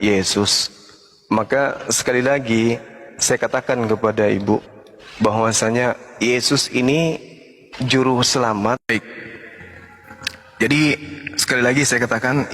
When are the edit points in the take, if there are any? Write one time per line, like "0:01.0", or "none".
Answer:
0:08.9

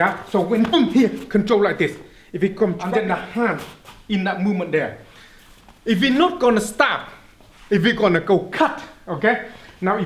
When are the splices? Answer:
0:02.8

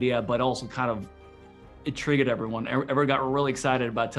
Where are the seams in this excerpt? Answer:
none

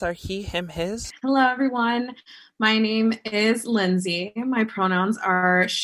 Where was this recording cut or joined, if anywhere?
0:01.1

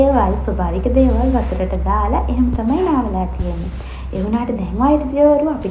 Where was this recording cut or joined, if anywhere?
none

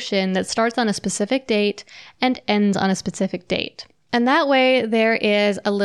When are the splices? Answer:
none

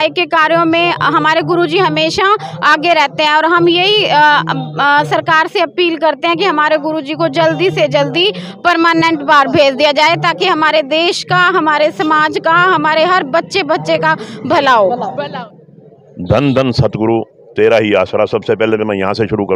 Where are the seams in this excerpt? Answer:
0:15.4

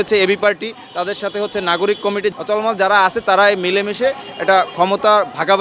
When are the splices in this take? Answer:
0:02.3

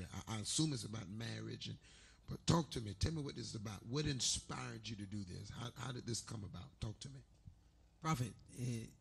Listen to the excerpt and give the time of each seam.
0:02.9

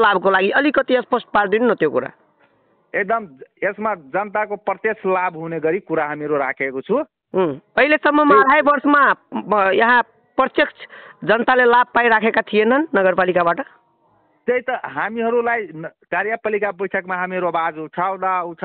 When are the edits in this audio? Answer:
none

